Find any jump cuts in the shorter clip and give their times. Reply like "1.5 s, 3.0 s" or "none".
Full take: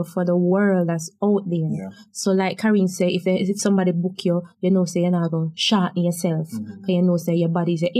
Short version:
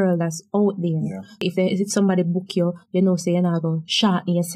1.5 s